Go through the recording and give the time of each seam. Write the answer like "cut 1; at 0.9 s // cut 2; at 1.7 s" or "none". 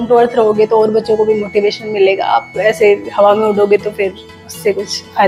none